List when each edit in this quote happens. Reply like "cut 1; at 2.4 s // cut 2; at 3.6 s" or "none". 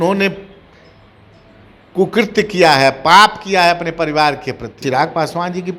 cut 1; at 4.8 s